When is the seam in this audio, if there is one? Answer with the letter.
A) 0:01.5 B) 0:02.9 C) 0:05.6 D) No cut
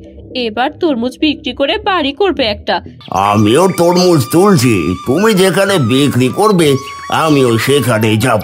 B